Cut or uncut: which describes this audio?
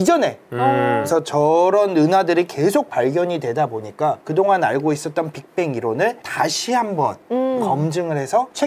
cut